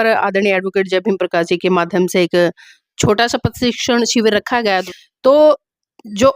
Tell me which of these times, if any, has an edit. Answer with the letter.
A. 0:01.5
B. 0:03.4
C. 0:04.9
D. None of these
C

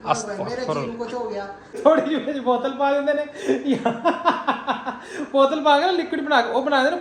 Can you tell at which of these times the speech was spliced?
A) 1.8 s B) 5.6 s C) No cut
A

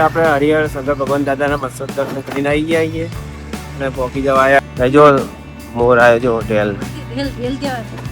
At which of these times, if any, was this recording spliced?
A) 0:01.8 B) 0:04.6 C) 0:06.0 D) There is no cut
B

